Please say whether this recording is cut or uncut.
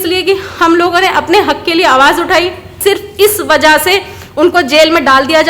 cut